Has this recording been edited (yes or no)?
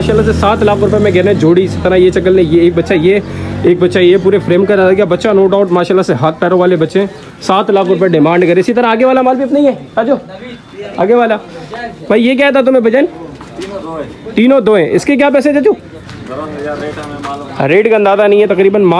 no